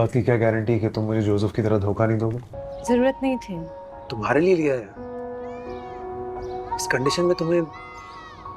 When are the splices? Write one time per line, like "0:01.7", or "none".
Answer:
0:02.5